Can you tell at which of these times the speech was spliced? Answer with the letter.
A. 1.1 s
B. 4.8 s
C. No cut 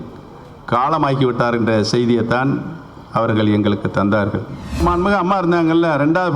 B